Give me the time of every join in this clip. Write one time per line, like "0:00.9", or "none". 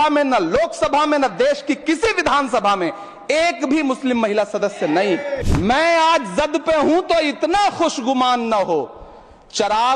0:05.4